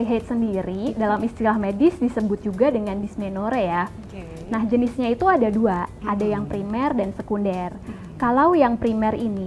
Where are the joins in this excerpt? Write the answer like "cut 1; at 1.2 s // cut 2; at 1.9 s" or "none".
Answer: none